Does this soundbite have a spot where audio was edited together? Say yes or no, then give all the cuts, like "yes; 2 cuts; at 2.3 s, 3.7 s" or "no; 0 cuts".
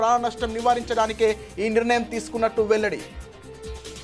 yes; 1 cut; at 3.1 s